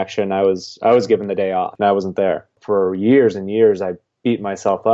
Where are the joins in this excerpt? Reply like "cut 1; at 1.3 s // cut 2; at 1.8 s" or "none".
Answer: cut 1; at 1.7 s // cut 2; at 2.6 s